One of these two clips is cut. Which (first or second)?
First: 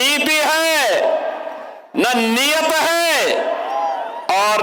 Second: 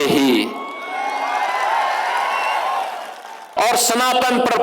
second